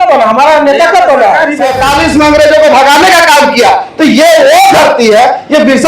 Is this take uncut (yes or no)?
no